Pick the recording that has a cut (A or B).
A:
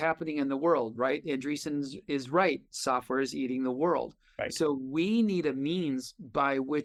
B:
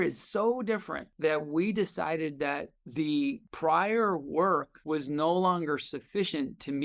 B